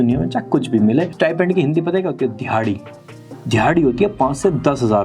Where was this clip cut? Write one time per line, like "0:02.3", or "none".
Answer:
0:01.1